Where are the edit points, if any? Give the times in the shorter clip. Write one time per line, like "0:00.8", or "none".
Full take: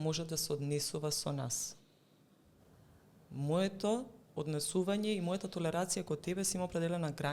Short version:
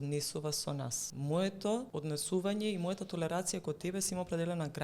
0:01.0
0:01.9